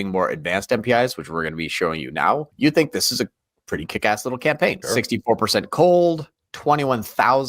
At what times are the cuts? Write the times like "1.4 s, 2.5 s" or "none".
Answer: 2.5 s, 4.8 s